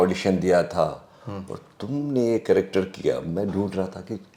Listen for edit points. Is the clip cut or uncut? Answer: uncut